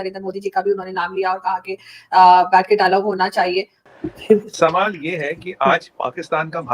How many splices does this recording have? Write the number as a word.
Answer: one